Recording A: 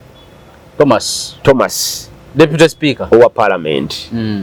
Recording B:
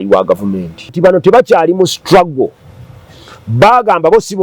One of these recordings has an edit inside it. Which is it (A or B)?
B